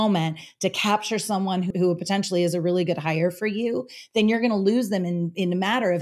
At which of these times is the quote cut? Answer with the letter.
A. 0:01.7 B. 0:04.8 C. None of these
A